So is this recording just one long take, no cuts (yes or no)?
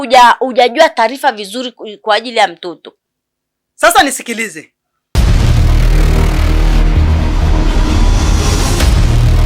no